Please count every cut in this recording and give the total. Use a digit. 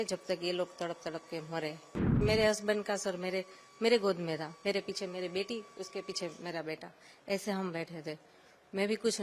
1